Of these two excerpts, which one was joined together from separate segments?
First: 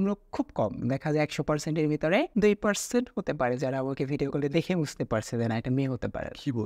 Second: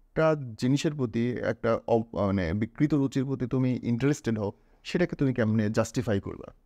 first; 1 cut; at 2.3 s

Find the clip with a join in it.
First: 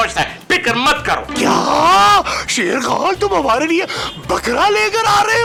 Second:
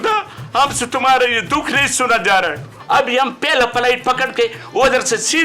second; 1 cut; at 2.8 s

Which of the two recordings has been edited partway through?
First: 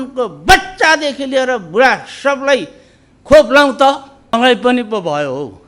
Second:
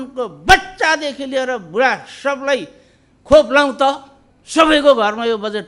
first; 1 cut; at 4.2 s

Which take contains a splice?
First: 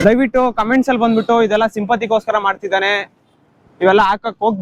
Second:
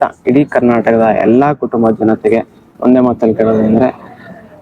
second; 1 cut; at 2.7 s

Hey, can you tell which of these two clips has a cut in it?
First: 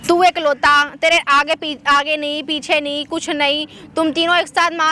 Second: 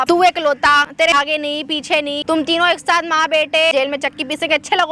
second; 3 cuts; at 0.9 s, 2.2 s, 3.7 s

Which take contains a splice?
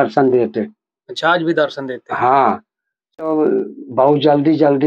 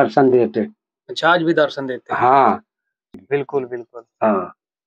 second; 1 cut; at 3.2 s

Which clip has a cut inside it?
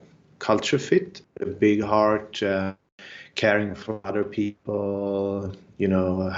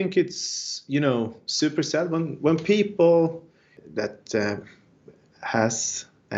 first; 1 cut; at 1.1 s

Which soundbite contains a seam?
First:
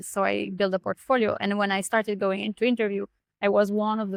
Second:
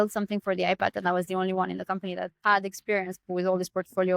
second; 3 cuts; at 1.0 s, 2.3 s, 3.2 s

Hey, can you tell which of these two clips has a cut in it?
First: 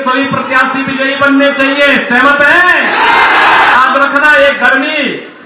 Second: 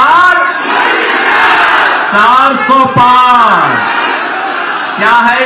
first; 1 cut; at 3.7 s

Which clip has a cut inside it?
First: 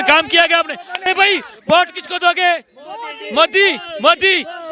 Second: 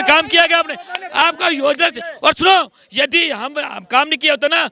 first; 1 cut; at 1.0 s

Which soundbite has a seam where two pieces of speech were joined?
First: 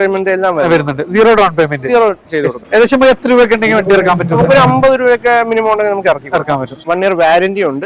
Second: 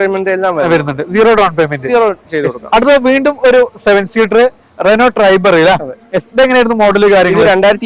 first; 2 cuts; at 2.6 s, 6.7 s

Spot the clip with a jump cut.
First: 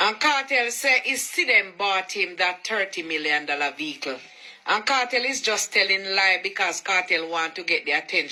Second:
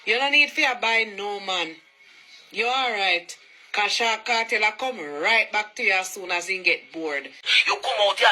second; 1 cut; at 7.4 s

